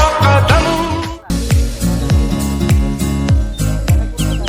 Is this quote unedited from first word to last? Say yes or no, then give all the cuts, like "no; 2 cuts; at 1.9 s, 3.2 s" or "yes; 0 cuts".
yes; 0 cuts